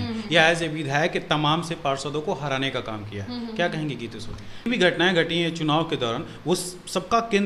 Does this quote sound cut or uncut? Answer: cut